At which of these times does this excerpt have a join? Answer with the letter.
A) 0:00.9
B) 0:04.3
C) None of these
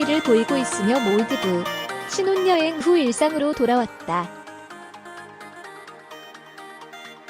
B